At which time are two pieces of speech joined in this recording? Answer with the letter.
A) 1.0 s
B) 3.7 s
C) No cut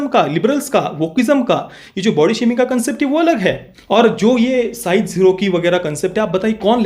B